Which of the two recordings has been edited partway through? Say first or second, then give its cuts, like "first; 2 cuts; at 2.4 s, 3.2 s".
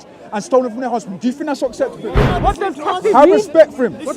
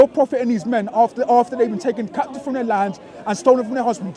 first; 1 cut; at 2.3 s